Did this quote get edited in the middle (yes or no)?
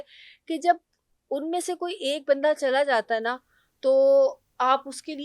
no